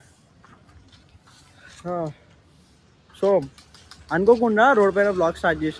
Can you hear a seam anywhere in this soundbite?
no; 0 cuts

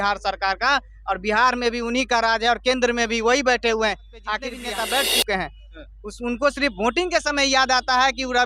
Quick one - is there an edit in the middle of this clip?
yes; 1 cut; at 4.6 s

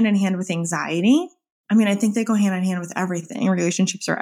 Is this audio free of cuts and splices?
no; 1 cut; at 3.3 s

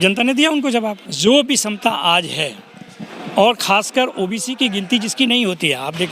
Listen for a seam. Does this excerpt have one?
yes; 1 cut; at 1.1 s

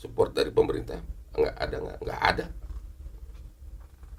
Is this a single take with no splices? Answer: yes; 0 cuts

